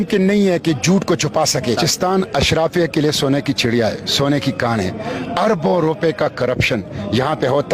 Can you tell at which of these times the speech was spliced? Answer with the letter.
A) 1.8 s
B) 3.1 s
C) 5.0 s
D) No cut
A